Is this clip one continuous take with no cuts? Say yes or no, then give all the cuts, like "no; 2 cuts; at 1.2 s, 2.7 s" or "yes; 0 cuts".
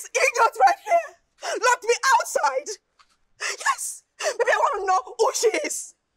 yes; 0 cuts